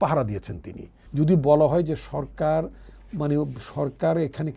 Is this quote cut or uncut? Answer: cut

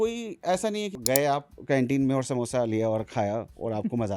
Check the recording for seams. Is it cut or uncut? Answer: cut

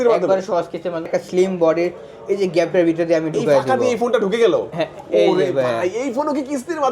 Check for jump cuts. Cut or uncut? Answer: cut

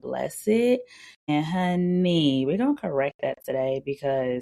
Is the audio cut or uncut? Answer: cut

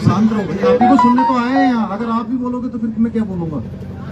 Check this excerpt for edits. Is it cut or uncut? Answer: uncut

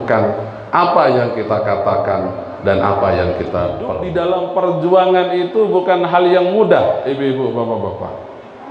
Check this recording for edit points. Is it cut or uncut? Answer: cut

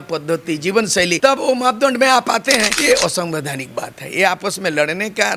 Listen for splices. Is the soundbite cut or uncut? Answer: cut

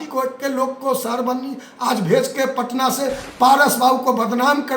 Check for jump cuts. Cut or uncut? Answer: cut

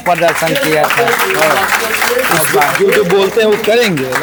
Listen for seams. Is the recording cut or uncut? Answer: uncut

